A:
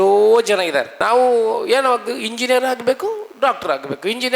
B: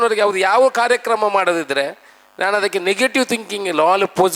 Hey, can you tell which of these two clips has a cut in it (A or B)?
A